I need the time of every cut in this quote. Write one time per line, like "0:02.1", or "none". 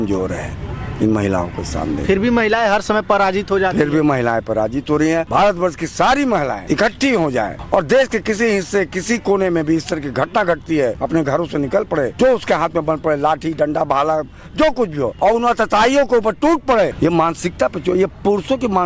0:05.3
0:06.6
0:07.6
0:11.0
0:12.1
0:15.1
0:16.9